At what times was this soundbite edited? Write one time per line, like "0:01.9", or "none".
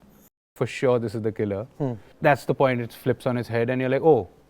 0:02.0